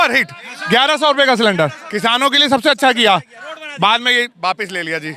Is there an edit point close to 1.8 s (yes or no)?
yes